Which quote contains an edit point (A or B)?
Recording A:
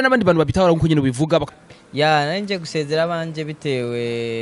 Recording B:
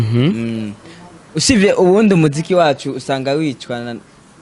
A